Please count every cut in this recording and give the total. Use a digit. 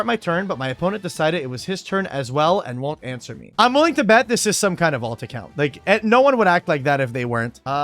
1